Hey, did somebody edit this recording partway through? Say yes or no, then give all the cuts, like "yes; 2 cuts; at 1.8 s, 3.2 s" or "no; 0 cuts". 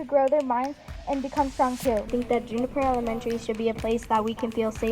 yes; 1 cut; at 2.1 s